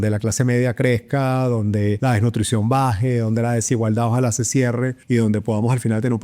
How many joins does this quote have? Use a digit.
2